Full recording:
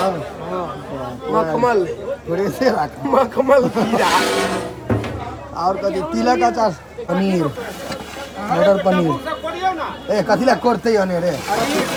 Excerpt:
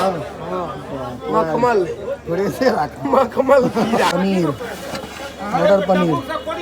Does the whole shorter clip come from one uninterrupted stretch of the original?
no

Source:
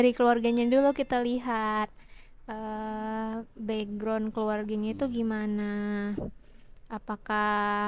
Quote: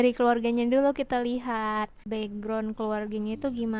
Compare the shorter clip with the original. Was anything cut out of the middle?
yes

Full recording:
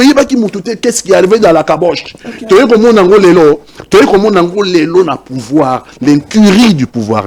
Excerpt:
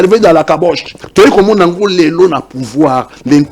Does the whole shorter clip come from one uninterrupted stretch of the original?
no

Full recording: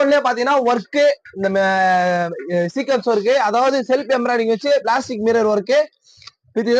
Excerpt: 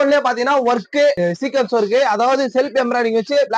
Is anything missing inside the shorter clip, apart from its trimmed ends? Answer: yes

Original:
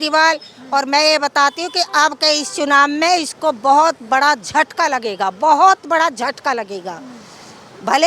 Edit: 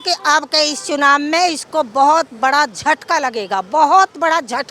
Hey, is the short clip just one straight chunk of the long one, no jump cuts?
yes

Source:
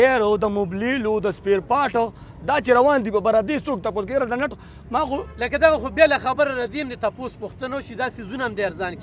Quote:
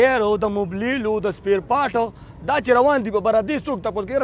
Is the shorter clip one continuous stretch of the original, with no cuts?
yes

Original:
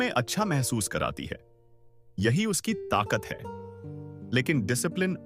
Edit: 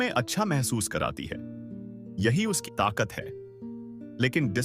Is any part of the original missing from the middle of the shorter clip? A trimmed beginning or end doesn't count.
yes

